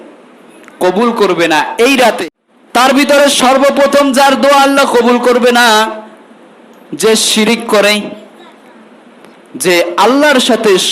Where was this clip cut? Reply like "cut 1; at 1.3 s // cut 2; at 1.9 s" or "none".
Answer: cut 1; at 2.2 s